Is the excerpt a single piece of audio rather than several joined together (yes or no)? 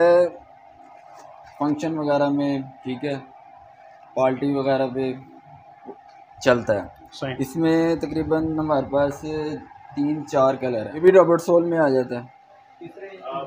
no